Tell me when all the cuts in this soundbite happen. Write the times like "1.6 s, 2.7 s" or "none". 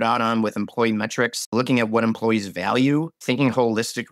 1.4 s, 3.1 s